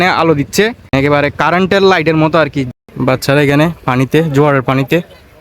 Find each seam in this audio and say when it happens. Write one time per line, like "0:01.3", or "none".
0:00.9
0:02.6